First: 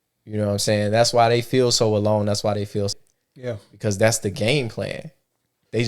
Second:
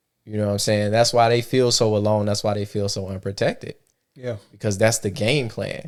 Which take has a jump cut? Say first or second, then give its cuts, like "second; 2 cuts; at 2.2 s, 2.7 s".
first; 1 cut; at 3.0 s